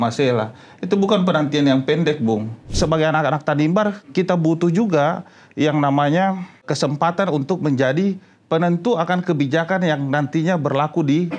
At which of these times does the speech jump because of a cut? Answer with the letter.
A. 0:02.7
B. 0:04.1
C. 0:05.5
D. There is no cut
A